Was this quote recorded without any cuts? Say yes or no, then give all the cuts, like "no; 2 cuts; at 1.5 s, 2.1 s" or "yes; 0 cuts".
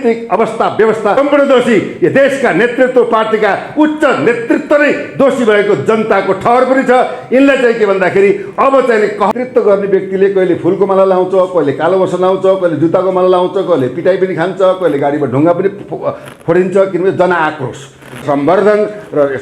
no; 3 cuts; at 1.2 s, 9.3 s, 18.2 s